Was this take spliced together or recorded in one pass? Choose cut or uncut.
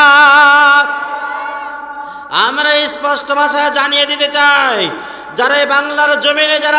uncut